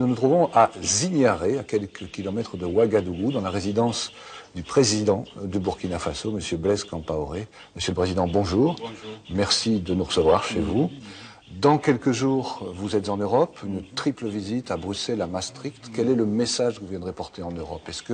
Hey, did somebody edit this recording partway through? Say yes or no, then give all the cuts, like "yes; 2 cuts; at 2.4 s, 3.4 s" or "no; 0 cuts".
no; 0 cuts